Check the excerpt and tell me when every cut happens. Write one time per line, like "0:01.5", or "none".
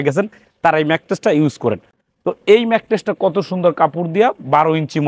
none